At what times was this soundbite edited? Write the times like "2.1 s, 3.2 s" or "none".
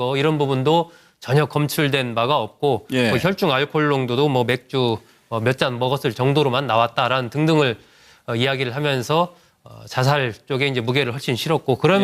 5.6 s